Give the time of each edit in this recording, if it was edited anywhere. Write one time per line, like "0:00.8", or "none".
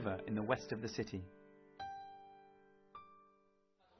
none